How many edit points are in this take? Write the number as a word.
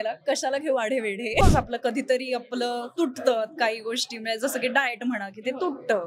one